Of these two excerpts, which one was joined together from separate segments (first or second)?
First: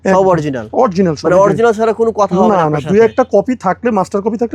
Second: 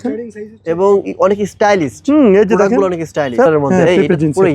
second